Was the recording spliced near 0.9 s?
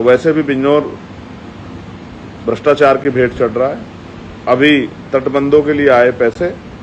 no; 0 cuts

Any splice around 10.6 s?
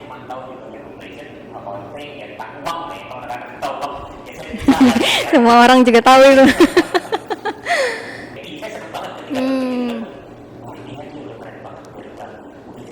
no; 1 cut; at 8.4 s

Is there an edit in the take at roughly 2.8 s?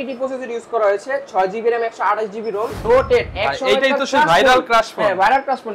yes; 1 cut; at 2.8 s

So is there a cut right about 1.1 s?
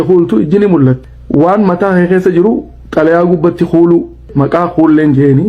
yes; 2 cuts; at 1.1 s, 4.3 s

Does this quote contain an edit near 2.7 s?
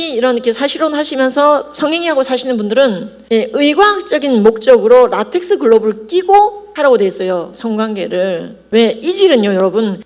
no; 0 cuts

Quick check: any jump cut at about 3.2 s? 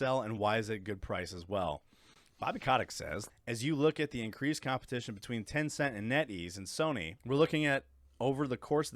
yes; 2 cuts; at 3.2 s, 7.1 s

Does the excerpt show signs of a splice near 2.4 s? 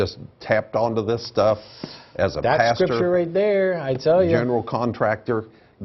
no; 1 cut; at 1.0 s

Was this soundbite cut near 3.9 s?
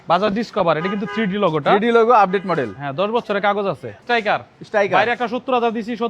yes; 1 cut; at 3.9 s

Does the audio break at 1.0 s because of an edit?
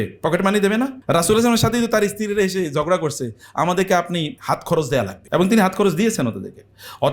yes; 3 cuts; at 1.0 s, 4.4 s, 5.2 s

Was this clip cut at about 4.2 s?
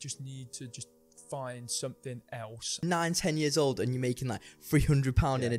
no; 1 cut; at 2.8 s

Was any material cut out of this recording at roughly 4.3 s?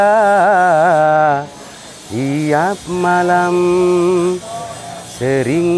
no; 0 cuts

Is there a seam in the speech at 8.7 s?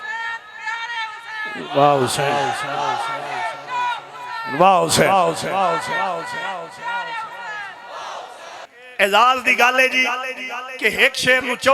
yes; 1 cut; at 8.7 s

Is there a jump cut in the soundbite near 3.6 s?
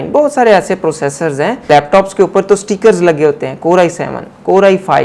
no; 1 cut; at 1.7 s

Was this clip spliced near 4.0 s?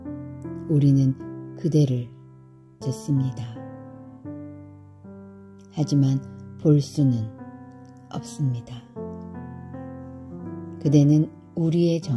yes; 2 cuts; at 4.0 s, 5.8 s

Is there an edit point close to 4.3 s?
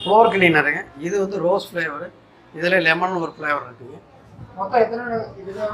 no; 0 cuts

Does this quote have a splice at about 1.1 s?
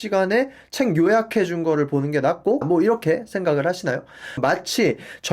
no; 2 cuts; at 2.6 s, 4.4 s

